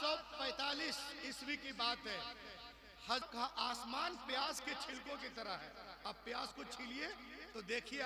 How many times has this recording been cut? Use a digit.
1